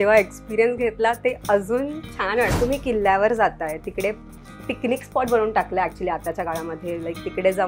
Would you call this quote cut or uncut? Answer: cut